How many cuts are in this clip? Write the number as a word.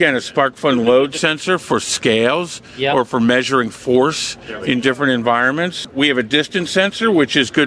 one